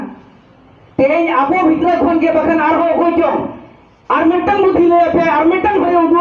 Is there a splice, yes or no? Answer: no